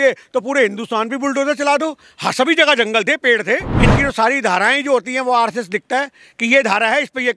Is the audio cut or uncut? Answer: cut